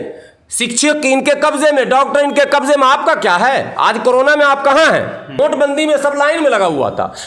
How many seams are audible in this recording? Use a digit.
1